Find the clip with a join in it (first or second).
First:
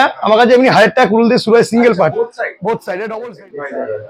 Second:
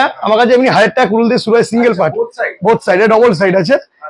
first